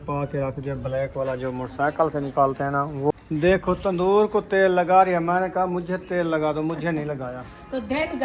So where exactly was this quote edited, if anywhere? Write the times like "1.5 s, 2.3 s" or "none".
3.1 s